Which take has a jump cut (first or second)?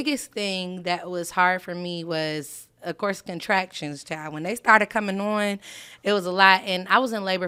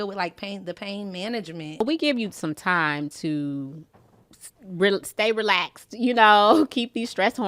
second